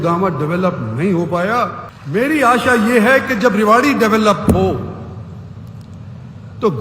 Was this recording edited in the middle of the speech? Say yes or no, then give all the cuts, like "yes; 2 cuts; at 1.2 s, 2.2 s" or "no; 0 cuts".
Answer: yes; 1 cut; at 1.9 s